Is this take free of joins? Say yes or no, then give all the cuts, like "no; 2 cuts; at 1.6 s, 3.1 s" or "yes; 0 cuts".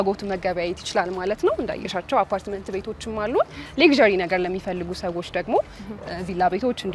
yes; 0 cuts